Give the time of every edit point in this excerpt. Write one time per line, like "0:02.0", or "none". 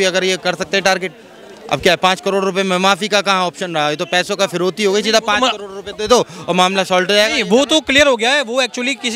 none